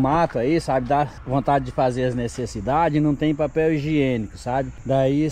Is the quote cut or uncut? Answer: uncut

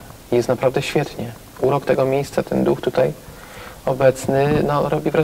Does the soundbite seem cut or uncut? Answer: uncut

